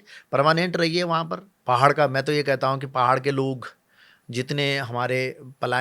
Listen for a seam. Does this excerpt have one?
yes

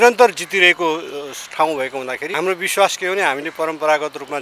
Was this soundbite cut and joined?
yes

